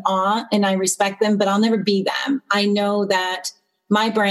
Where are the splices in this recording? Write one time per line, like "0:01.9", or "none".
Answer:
none